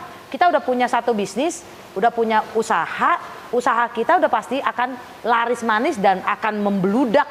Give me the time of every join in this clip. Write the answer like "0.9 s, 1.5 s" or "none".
none

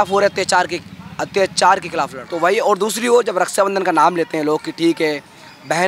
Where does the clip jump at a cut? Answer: 2.2 s

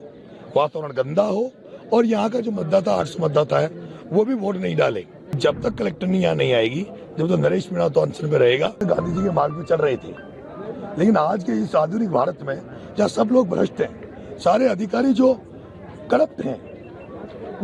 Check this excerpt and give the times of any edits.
5.3 s, 8.8 s

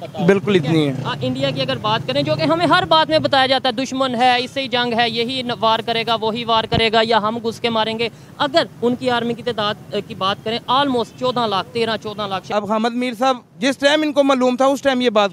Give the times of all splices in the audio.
12.5 s

